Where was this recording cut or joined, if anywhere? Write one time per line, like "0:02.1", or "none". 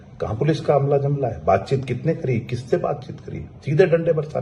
none